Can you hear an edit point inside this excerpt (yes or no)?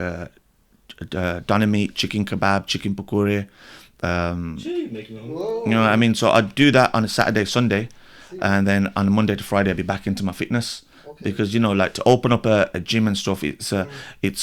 no